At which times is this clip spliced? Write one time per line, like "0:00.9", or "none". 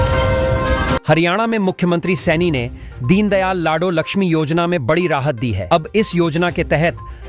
0:01.0